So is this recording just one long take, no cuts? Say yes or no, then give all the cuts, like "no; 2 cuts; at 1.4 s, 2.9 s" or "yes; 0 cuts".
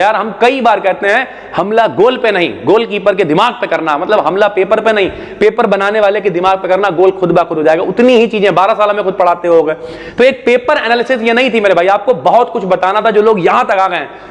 yes; 0 cuts